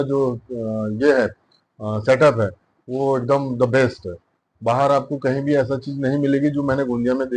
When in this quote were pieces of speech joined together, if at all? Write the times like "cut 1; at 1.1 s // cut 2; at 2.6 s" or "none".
none